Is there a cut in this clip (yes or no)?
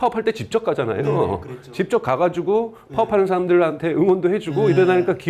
no